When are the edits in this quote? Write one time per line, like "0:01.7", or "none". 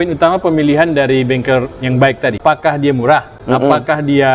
0:02.4
0:03.3